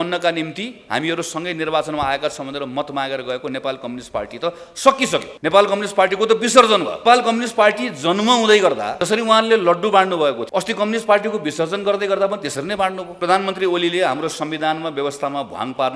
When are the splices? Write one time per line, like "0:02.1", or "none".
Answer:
0:05.3
0:07.0
0:08.9
0:10.4
0:13.1